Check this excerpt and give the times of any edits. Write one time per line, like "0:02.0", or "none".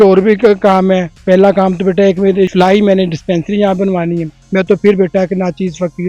0:02.5
0:04.4